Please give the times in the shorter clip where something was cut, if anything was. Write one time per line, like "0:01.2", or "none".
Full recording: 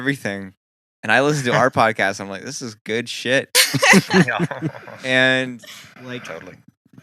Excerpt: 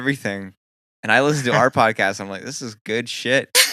none